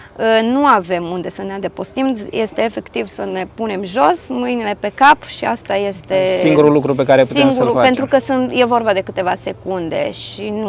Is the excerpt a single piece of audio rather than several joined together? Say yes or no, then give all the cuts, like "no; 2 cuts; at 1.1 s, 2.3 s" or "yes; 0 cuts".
yes; 0 cuts